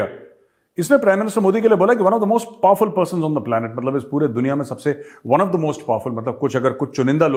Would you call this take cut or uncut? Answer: uncut